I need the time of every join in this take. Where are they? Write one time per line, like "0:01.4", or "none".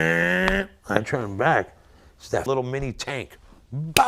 0:02.4